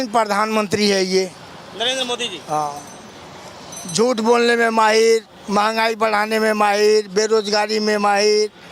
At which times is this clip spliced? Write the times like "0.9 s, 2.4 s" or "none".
none